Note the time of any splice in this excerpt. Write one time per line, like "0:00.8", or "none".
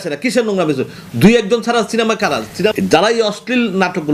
0:02.7